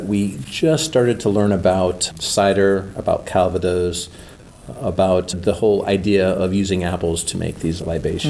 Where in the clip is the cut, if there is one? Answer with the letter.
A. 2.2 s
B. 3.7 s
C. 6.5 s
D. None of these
D